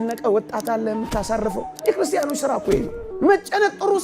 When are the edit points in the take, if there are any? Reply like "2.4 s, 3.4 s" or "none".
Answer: 3.1 s